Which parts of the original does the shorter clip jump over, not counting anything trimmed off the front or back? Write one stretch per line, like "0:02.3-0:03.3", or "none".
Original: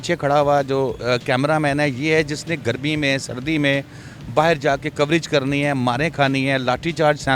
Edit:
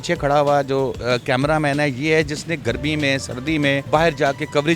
0:03.8-0:04.3